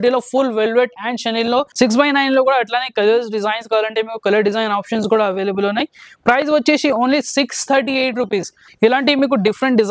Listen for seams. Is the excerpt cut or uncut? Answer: cut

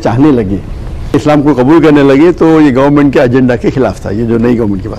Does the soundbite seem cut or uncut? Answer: cut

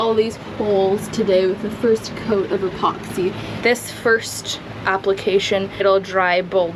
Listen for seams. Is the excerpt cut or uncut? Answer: cut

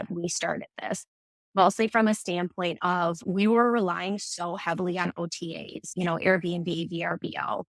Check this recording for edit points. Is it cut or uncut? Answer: cut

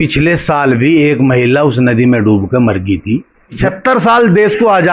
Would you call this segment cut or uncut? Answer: cut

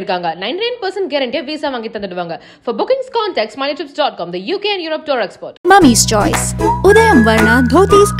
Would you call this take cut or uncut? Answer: uncut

